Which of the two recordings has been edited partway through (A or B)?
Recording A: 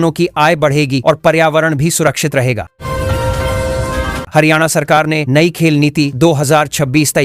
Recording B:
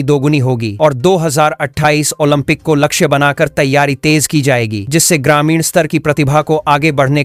A